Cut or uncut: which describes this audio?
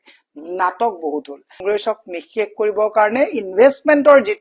cut